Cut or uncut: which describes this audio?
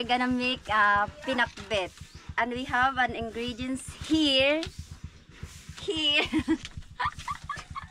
uncut